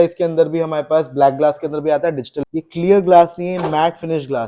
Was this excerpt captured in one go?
no; 1 cut; at 2.3 s

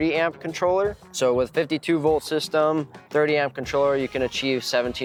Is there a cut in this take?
no; 0 cuts

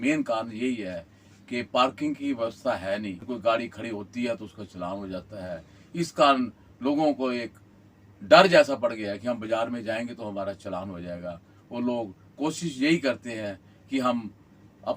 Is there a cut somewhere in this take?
yes; 1 cut; at 3.2 s

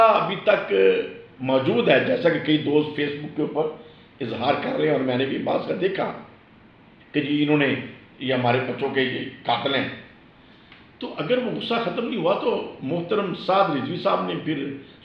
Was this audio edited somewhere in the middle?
no; 0 cuts

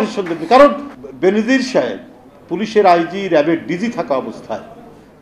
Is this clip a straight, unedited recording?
no; 1 cut; at 0.9 s

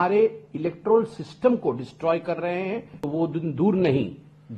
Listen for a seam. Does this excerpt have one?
yes; 1 cut; at 2.9 s

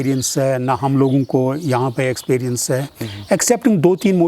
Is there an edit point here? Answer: yes; 1 cut; at 2.9 s

